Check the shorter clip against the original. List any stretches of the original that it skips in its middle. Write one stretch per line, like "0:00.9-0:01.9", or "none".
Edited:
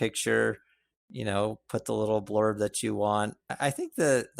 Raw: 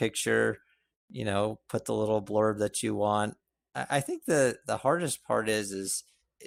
0:03.4-0:03.7